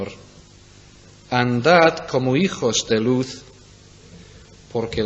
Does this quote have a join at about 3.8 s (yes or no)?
no